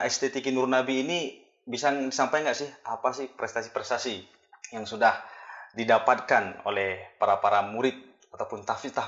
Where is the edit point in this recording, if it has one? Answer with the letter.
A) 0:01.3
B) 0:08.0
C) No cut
C